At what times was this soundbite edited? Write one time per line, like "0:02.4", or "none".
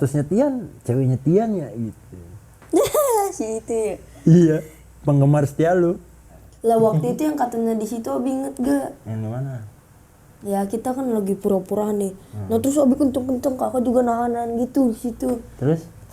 0:06.4